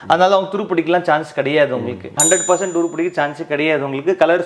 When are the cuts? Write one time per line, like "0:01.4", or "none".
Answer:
0:02.2